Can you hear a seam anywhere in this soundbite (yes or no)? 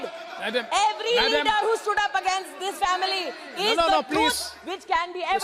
no